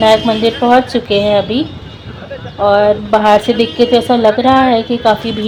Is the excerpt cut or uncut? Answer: uncut